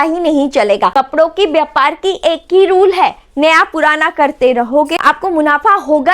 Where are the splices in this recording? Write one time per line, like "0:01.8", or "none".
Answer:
0:00.9
0:04.9